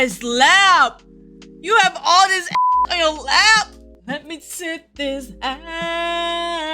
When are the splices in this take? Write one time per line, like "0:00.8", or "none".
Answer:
0:03.9